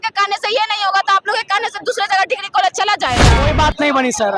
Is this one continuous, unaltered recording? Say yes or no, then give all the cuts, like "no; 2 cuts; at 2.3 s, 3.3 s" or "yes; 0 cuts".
no; 1 cut; at 3.4 s